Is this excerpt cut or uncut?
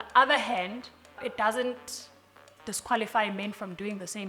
cut